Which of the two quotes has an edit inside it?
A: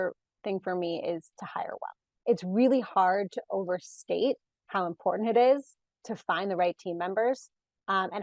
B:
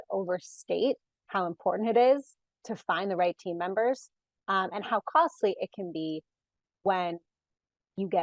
A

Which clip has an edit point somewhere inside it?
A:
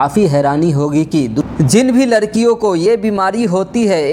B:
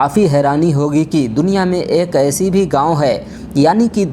A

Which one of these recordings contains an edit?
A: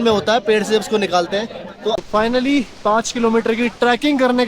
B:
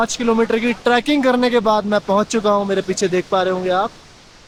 A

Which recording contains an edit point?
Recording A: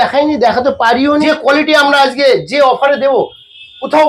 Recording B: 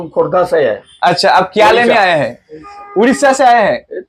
A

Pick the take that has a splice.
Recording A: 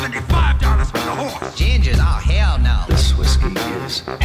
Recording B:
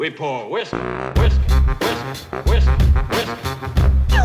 B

